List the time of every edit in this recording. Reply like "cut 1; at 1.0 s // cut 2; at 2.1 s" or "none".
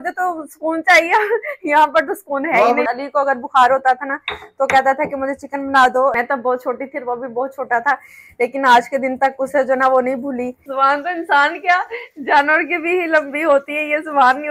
cut 1; at 2.9 s // cut 2; at 6.1 s // cut 3; at 10.6 s